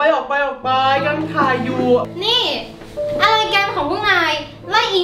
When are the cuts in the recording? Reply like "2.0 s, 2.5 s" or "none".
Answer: 2.1 s